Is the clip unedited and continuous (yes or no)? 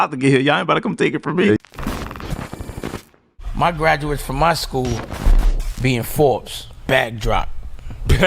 no